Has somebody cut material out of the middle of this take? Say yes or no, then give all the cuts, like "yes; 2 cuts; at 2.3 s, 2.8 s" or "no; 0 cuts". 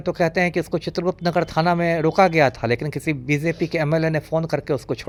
no; 0 cuts